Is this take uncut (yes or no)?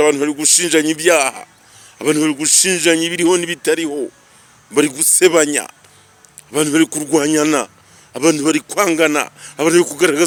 yes